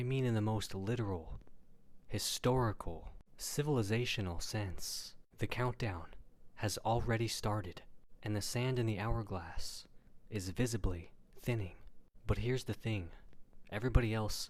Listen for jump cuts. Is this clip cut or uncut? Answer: uncut